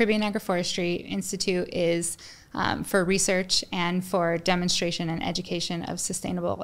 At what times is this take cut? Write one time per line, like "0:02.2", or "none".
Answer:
none